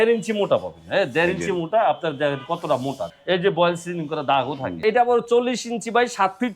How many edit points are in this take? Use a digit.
2